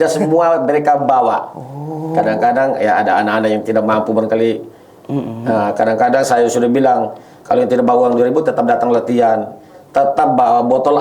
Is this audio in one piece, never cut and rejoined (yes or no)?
yes